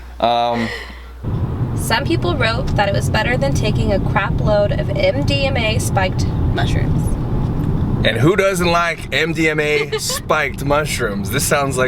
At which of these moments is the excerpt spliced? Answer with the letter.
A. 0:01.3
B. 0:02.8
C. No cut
A